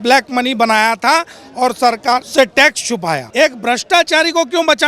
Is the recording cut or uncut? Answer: cut